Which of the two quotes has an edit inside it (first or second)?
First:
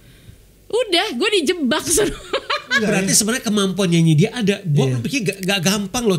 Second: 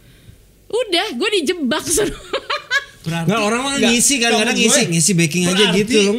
first